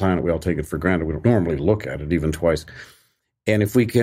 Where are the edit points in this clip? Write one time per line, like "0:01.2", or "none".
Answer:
0:01.2